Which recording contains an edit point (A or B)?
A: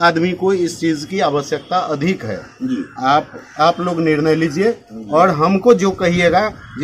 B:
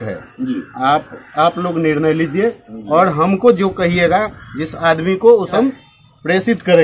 B